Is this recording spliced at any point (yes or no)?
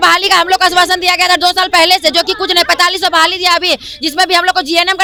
no